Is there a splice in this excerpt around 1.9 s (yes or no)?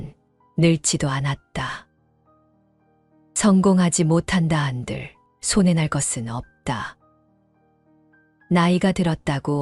yes